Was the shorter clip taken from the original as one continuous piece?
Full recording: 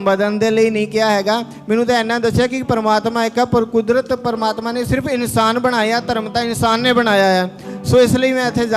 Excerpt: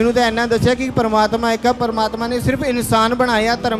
no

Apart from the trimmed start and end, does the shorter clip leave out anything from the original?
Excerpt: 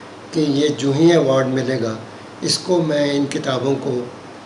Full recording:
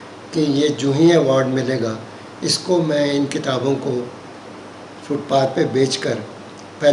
no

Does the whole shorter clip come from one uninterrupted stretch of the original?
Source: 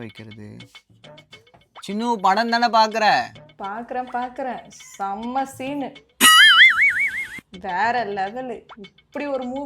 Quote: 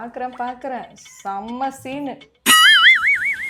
yes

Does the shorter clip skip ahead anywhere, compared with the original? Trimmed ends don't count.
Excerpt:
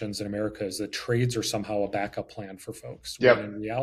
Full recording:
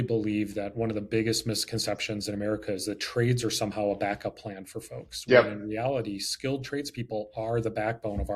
no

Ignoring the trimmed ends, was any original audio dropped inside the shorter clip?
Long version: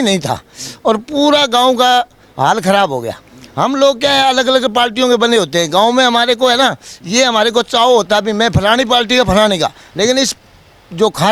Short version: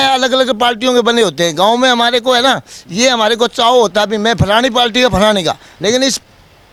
no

